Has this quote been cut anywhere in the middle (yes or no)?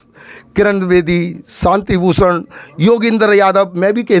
no